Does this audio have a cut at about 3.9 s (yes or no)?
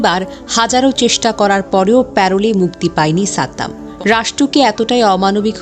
yes